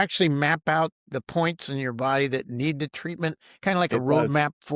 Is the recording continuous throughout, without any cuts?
no; 1 cut; at 1.0 s

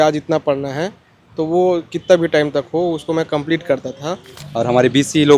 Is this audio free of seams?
no; 1 cut; at 4.4 s

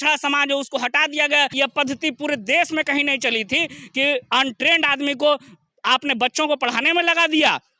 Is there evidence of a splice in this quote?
yes; 1 cut; at 1.5 s

